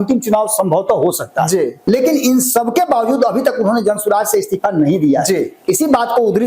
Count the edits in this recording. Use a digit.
1